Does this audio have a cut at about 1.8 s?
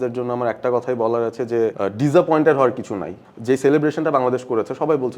yes; 2 cuts; at 1.8 s, 3.2 s

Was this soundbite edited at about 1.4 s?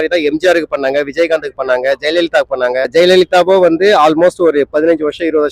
no; 1 cut; at 2.9 s

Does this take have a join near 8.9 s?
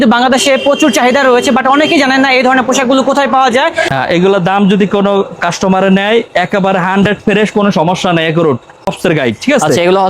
yes; 2 cuts; at 3.8 s, 8.9 s

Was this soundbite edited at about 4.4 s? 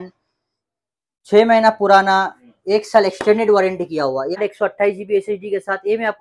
yes; 1 cut; at 4.4 s

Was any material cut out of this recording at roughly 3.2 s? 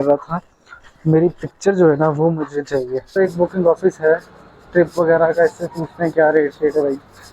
yes; 1 cut; at 3.2 s

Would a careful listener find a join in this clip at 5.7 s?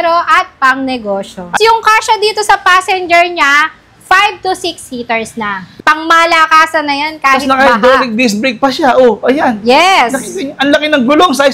yes; 2 cuts; at 1.5 s, 5.7 s

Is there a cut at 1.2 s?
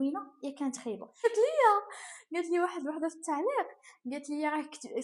yes; 1 cut; at 1.2 s

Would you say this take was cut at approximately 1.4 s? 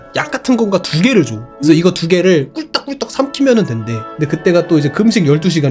yes; 1 cut; at 1.4 s

